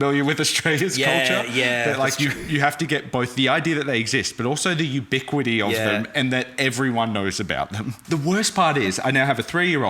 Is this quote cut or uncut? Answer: cut